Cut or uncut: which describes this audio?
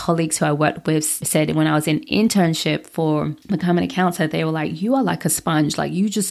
cut